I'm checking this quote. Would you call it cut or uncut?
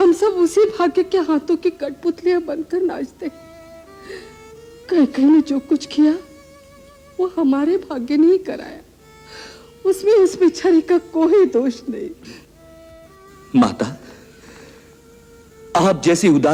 uncut